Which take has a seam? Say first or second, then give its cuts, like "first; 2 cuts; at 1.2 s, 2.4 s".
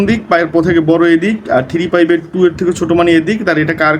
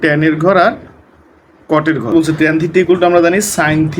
second; 1 cut; at 2.1 s